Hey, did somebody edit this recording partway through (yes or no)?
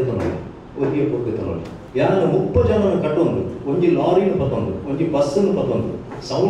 yes